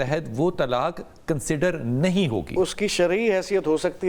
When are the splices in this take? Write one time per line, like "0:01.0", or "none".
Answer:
none